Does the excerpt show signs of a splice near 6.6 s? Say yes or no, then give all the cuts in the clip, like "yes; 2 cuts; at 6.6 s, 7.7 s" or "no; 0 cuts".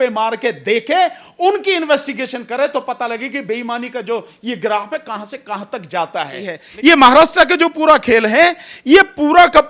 yes; 1 cut; at 6.6 s